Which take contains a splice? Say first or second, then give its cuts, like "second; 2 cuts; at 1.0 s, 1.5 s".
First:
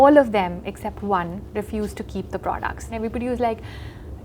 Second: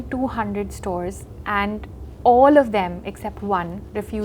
first; 1 cut; at 2.9 s